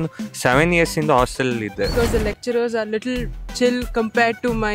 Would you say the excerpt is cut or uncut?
cut